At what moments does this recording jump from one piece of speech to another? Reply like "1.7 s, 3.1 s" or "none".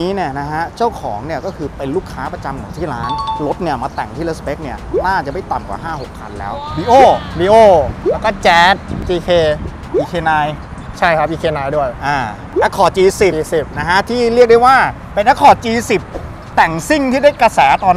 3.4 s, 6.6 s

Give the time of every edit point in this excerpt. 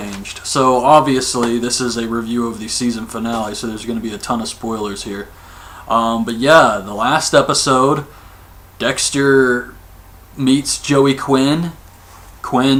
none

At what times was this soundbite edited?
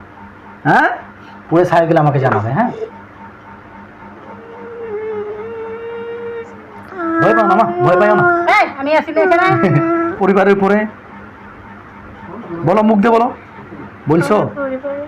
10.2 s

